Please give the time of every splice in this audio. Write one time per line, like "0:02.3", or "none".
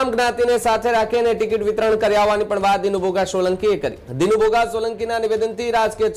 0:04.0